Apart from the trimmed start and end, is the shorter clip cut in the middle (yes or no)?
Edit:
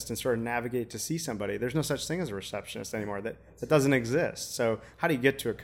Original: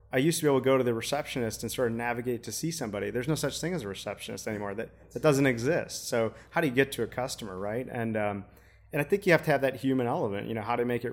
no